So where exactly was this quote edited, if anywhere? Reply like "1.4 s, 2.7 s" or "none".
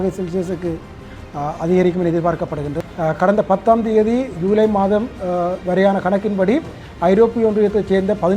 2.7 s